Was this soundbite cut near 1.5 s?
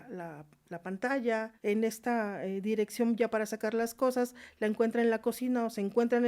yes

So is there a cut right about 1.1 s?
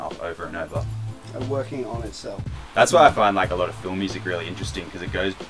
no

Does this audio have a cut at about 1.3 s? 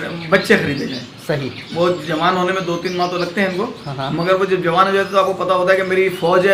no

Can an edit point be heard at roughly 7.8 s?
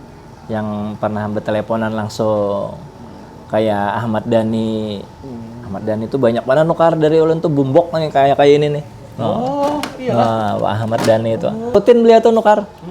no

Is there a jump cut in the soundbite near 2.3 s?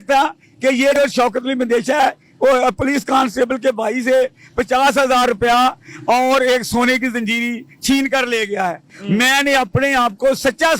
no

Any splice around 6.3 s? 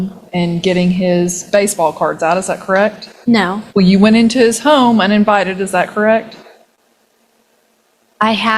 no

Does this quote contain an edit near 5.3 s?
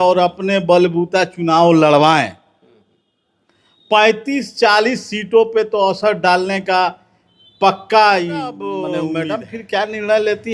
no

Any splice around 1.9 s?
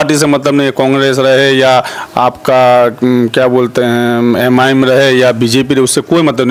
no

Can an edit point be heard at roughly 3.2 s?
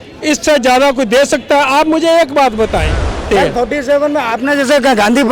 yes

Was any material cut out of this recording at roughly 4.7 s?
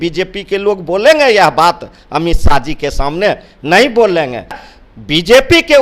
yes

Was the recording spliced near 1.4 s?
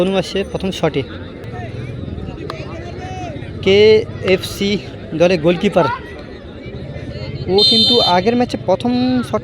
yes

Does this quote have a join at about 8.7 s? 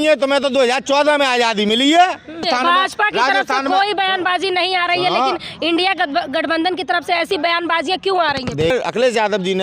yes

